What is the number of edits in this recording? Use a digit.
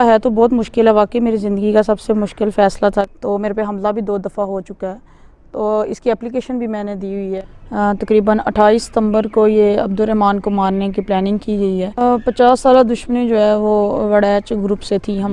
3